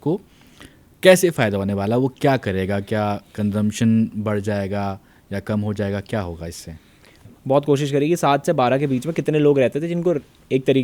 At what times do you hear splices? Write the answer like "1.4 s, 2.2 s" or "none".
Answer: 7.2 s